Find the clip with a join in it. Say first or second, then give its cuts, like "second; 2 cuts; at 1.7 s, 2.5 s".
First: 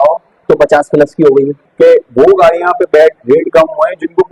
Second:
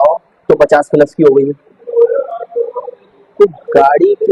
first; 1 cut; at 1.7 s